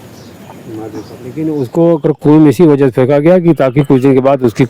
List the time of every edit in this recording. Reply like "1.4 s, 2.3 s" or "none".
1.4 s